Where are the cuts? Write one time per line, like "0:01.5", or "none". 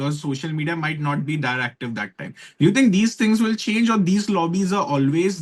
none